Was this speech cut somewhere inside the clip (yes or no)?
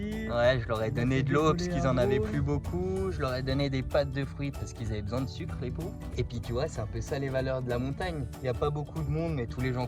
yes